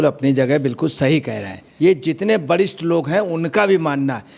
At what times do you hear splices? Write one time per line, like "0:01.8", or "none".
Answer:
0:01.6